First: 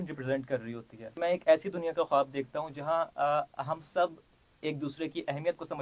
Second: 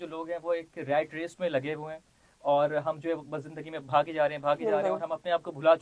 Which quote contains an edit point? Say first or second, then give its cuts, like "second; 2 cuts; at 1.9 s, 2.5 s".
first; 1 cut; at 1.1 s